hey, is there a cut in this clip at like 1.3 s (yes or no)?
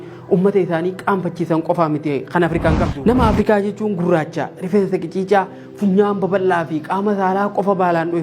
no